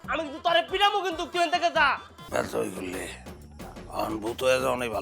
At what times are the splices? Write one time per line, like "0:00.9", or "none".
0:02.1